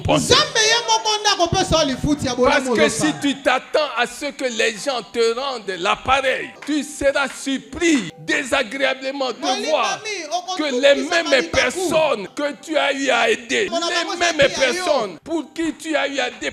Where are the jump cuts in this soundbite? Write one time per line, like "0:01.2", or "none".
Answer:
0:06.6
0:08.1
0:12.3
0:13.7
0:15.2